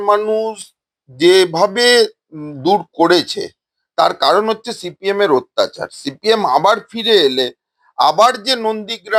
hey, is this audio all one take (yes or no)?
yes